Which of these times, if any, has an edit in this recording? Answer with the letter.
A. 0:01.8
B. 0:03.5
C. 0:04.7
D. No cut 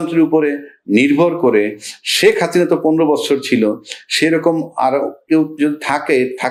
D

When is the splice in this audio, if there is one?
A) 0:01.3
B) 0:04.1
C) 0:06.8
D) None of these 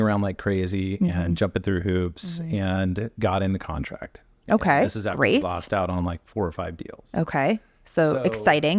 D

